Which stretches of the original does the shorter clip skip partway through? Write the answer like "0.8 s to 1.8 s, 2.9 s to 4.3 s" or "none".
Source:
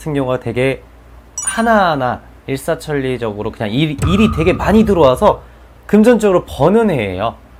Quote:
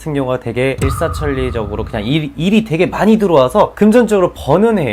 0.8 s to 2.4 s, 5.4 s to 5.8 s